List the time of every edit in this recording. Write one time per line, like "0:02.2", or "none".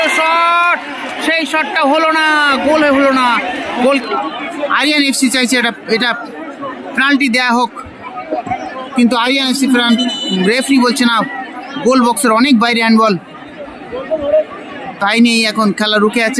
0:03.9

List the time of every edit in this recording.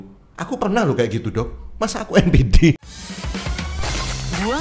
0:02.8

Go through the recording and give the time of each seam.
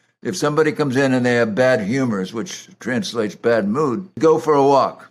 0:04.2

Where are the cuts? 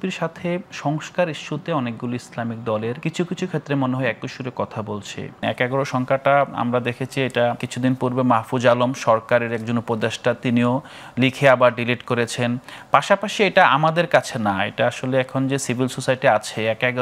0:03.0
0:05.4
0:07.7

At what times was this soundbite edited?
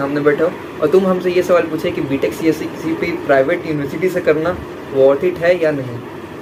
none

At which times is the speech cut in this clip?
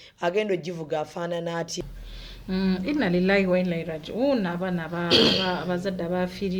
0:01.7

